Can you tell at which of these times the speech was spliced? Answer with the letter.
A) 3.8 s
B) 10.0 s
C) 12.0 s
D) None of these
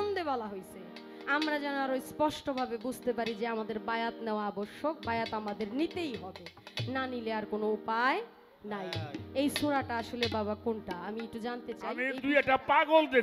C